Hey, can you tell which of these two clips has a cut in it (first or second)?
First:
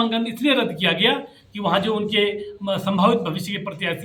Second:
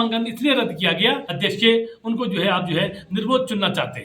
second